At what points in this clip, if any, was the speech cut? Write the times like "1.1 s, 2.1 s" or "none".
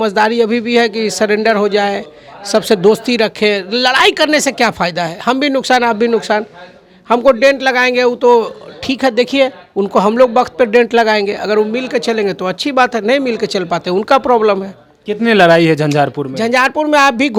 none